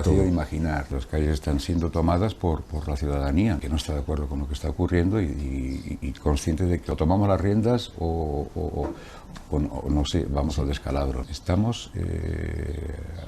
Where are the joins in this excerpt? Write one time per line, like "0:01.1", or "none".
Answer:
0:00.9
0:03.6
0:06.9
0:11.2

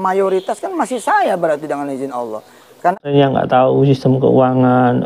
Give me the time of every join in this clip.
0:03.1

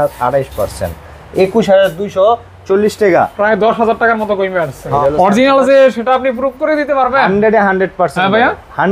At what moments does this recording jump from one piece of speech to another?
0:05.0

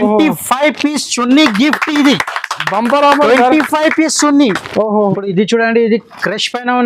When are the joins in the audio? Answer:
0:05.1

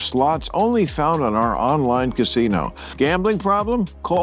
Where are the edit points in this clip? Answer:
0:02.8

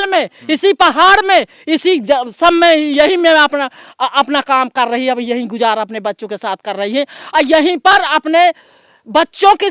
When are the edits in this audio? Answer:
none

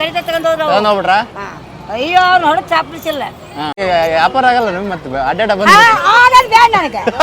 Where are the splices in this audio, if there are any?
0:03.8

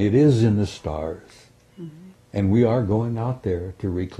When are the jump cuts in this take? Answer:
none

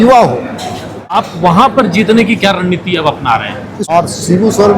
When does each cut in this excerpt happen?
0:01.2
0:03.9

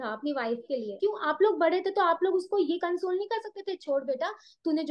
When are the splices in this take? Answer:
0:00.9

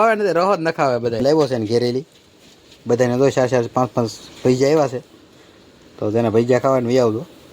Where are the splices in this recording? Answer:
0:01.2

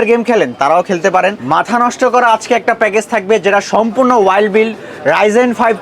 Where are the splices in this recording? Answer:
0:01.4

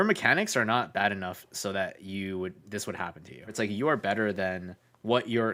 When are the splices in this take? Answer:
0:03.5

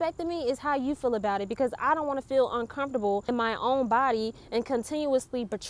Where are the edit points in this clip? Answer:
0:03.2

